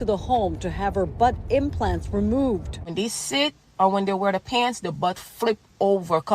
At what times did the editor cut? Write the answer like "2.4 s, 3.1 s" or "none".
2.8 s